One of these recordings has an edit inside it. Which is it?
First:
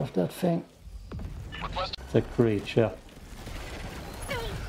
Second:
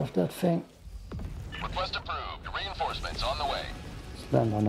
first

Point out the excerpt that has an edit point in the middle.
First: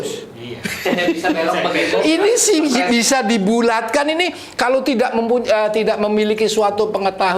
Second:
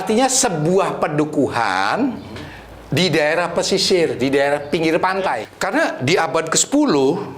second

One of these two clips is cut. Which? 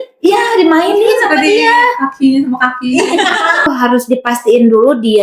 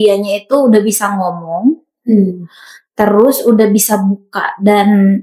first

